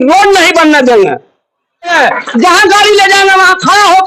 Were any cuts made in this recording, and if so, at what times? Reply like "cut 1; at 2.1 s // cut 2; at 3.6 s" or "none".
cut 1; at 1.5 s